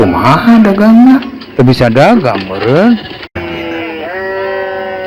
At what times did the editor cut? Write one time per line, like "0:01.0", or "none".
0:03.4